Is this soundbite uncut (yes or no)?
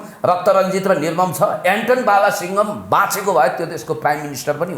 yes